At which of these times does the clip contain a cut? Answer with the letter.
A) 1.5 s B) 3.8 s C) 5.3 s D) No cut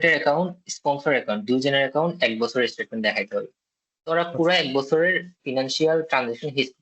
D